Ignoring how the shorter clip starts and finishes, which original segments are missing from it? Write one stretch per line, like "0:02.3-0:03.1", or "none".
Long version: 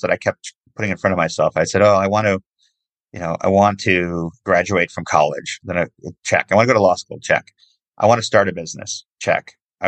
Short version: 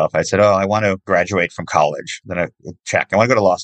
0:02.4-0:04.4